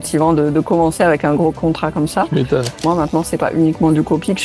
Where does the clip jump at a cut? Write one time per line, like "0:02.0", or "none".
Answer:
0:01.6
0:02.8